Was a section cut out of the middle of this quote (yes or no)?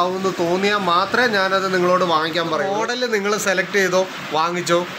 yes